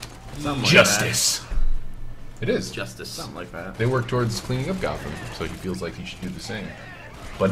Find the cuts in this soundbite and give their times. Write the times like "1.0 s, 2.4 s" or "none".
none